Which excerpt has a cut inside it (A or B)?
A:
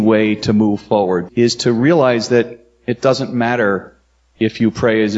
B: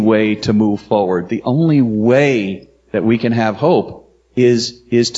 A